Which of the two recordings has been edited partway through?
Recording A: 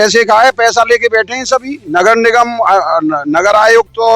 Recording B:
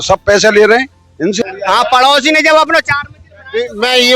B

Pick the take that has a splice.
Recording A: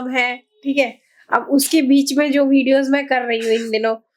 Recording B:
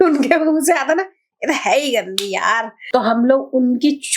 B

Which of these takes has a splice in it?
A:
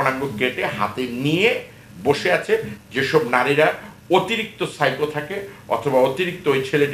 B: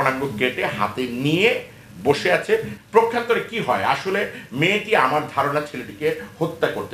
A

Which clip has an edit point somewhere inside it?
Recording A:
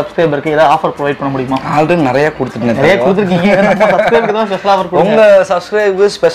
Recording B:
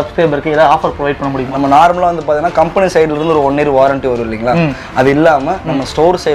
B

